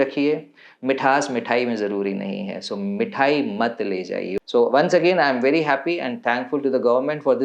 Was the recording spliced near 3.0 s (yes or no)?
no